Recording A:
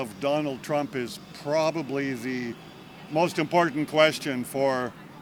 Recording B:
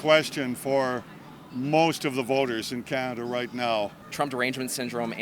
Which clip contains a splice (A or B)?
B